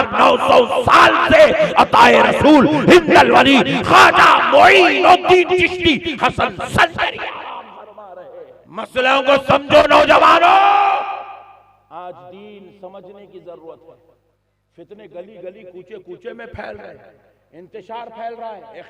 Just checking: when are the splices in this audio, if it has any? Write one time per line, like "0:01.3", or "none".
0:08.6

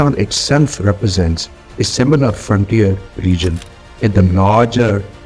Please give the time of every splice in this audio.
none

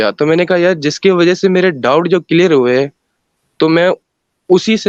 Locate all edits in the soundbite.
none

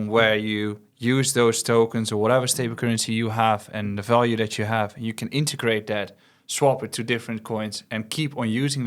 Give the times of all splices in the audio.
none

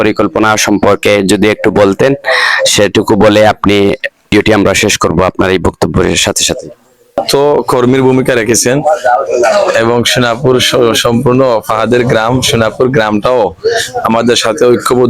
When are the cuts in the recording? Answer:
0:04.3
0:07.2

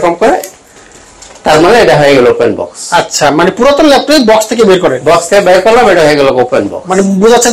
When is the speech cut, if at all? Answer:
none

